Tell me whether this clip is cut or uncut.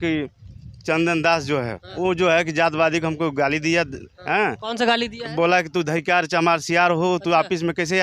cut